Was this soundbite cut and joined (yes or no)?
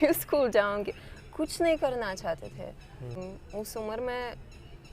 yes